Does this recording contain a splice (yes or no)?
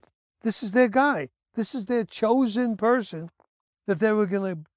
no